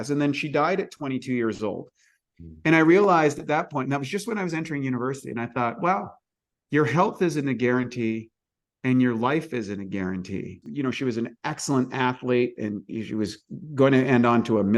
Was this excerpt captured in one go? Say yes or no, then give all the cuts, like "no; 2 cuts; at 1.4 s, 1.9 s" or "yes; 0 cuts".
no; 1 cut; at 10.6 s